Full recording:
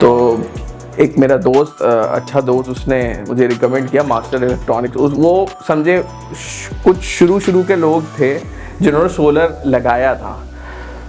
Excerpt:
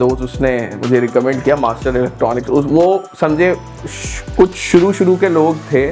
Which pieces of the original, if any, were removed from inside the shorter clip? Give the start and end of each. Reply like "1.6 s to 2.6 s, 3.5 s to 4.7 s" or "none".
none